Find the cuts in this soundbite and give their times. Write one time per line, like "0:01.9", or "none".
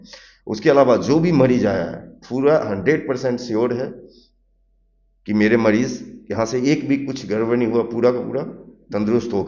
none